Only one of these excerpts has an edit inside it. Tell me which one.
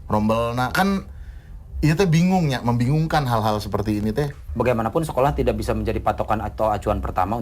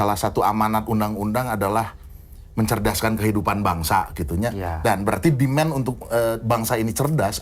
first; 1 cut; at 4.4 s

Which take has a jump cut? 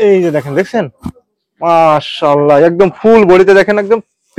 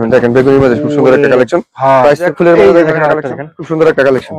second; 1 cut; at 2.3 s

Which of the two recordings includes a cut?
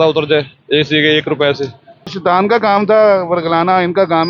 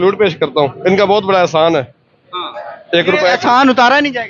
first; 1 cut; at 2.2 s

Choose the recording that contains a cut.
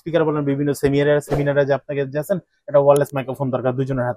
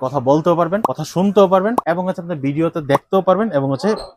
second; 2 cuts; at 1.0 s, 1.8 s

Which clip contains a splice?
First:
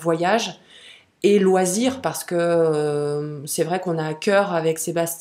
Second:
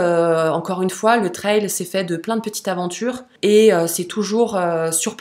second; 1 cut; at 3.3 s

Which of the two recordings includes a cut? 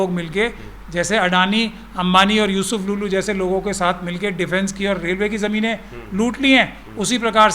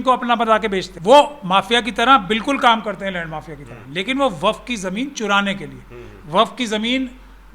second; 1 cut; at 0.9 s

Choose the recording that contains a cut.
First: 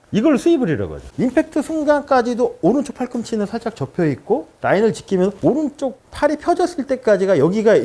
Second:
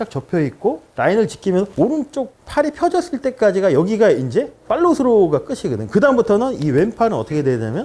first; 1 cut; at 1.0 s

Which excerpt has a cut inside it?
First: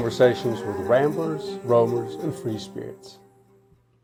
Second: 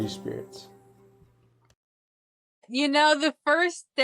second; 1 cut; at 2.7 s

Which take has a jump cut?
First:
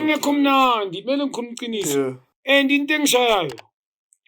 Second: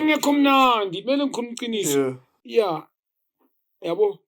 first; 1 cut; at 2.3 s

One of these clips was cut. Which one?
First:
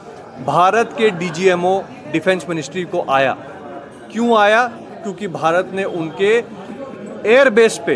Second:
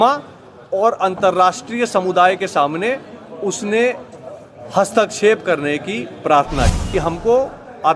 second; 1 cut; at 6.8 s

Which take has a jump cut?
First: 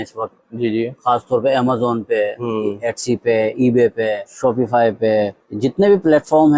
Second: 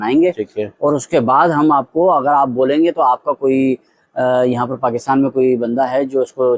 first; 2 cuts; at 4.3 s, 5.4 s

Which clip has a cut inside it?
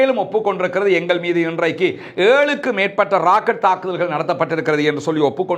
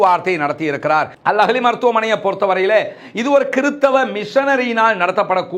second; 1 cut; at 1.1 s

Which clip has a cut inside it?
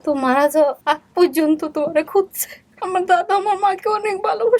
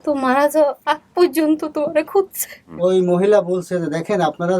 second; 1 cut; at 2.7 s

